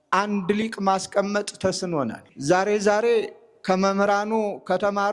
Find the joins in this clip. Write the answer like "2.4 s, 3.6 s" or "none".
2.2 s